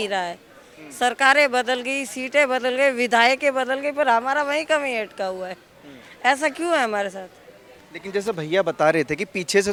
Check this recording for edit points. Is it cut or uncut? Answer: uncut